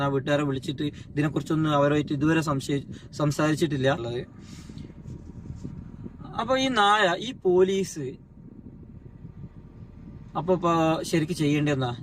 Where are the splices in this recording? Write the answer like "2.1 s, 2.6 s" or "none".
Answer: 4.1 s